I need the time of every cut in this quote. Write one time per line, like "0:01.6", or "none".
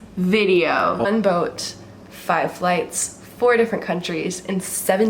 0:01.1

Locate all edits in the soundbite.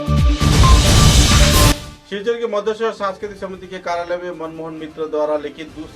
0:01.7

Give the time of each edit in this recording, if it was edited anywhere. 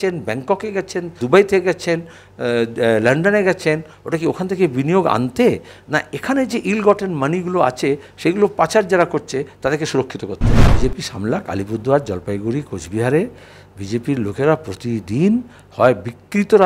0:01.1
0:10.6

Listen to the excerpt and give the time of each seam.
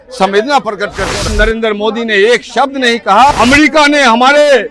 0:01.3
0:03.3

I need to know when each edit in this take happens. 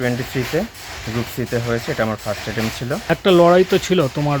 0:03.1

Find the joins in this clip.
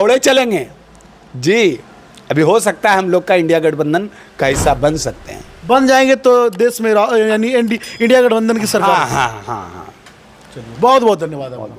none

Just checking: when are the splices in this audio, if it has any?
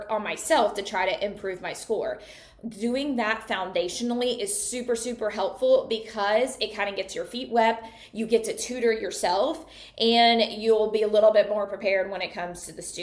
none

